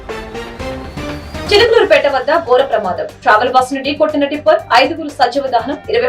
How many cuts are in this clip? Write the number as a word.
one